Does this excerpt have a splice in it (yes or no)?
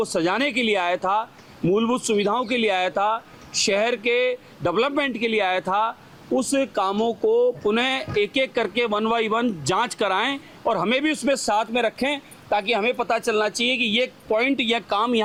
no